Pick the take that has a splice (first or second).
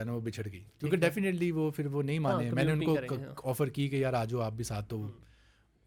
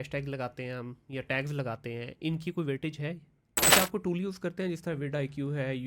second